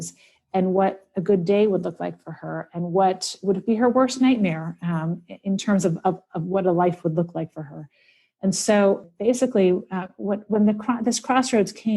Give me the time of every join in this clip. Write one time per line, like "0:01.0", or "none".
0:09.1